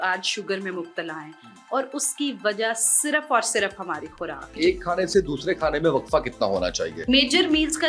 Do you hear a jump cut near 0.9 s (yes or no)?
no